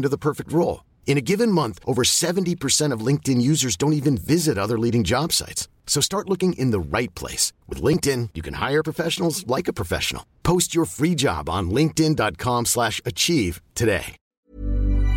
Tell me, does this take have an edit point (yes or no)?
yes